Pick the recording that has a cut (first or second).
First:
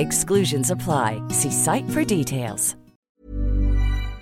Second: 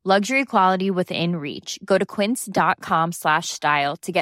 first